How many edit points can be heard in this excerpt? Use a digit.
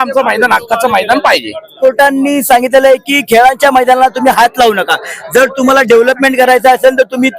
1